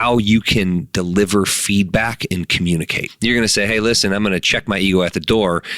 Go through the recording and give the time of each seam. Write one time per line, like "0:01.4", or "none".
0:03.0